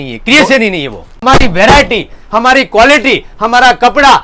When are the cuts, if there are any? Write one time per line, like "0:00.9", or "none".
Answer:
0:01.2